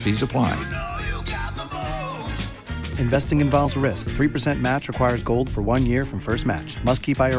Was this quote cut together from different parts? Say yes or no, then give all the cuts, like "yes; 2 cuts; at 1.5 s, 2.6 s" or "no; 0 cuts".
no; 0 cuts